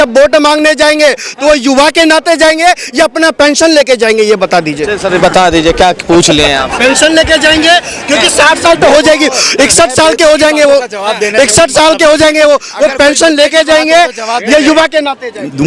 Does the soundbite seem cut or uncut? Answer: uncut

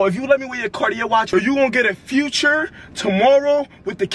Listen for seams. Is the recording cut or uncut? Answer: cut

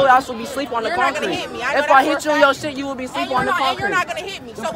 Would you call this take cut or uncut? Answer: uncut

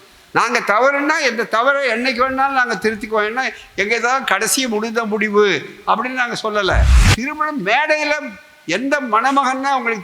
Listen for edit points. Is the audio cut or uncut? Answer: cut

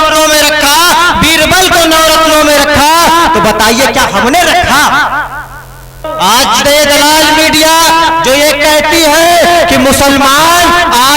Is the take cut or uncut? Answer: cut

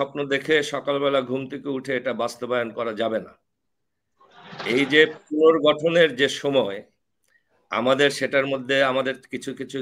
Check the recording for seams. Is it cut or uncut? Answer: uncut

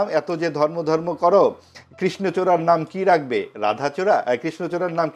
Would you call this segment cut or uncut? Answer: uncut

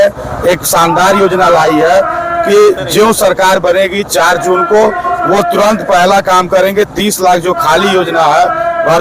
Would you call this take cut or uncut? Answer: uncut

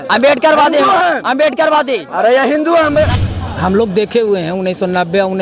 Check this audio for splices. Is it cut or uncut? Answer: cut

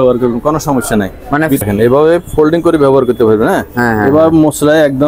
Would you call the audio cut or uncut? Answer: cut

